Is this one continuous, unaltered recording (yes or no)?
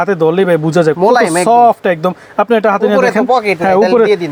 yes